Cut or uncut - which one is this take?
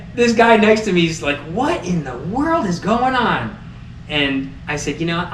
uncut